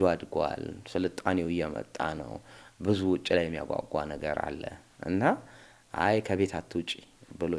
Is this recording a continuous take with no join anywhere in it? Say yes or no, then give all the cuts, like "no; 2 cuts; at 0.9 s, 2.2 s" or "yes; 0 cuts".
yes; 0 cuts